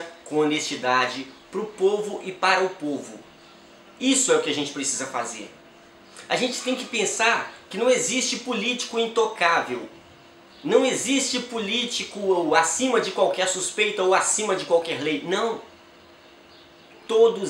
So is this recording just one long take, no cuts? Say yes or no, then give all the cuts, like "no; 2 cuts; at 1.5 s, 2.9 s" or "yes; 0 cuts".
yes; 0 cuts